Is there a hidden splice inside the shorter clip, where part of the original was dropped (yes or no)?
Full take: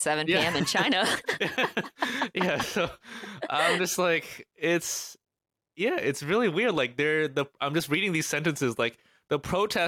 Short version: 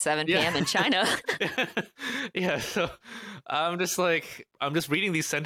yes